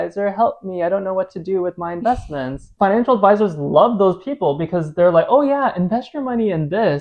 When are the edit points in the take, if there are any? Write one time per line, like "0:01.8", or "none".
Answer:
0:02.7